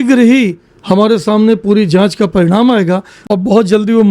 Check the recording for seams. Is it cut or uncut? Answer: cut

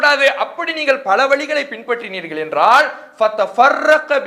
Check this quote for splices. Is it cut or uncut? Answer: uncut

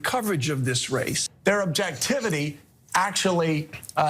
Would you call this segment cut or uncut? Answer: cut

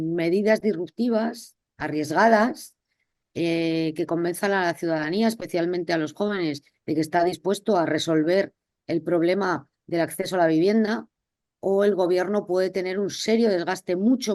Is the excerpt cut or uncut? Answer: uncut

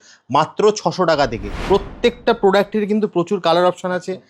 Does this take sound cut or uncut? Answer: cut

